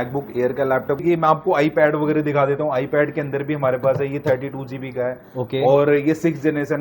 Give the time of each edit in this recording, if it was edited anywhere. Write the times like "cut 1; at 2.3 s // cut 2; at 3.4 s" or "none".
cut 1; at 1.0 s

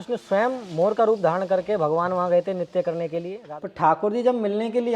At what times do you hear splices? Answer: cut 1; at 3.4 s

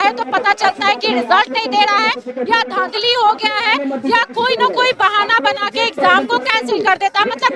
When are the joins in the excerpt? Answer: none

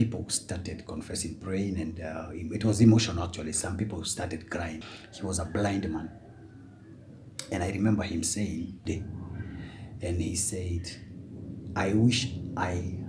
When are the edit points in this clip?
cut 1; at 4.9 s // cut 2; at 8.8 s

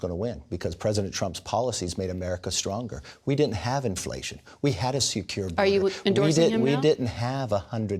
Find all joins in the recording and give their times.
cut 1; at 3.1 s

